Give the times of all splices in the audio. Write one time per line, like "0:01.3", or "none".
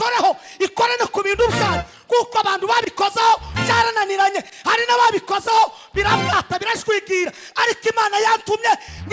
none